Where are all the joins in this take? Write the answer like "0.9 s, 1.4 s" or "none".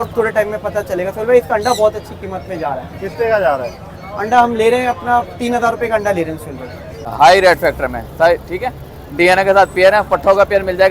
7.0 s